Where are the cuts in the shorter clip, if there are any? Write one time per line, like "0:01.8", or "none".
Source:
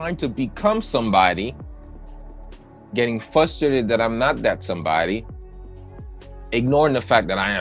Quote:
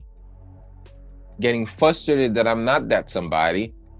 none